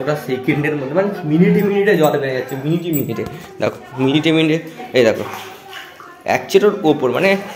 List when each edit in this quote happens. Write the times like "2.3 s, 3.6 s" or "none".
none